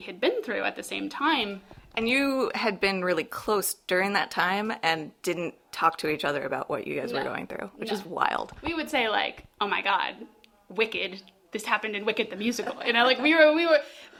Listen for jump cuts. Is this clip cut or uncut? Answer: uncut